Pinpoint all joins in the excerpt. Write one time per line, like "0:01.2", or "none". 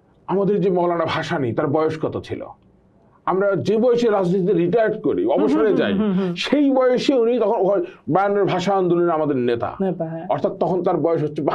none